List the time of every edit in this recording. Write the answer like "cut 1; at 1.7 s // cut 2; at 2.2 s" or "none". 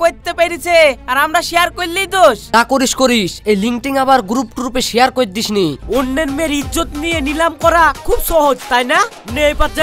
cut 1; at 2.4 s // cut 2; at 5.8 s